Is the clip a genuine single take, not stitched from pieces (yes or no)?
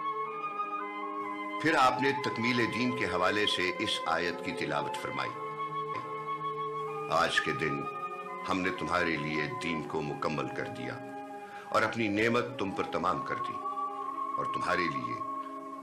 yes